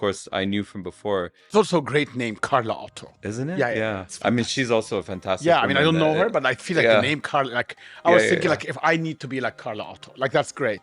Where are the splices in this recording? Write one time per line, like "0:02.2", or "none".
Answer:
0:01.4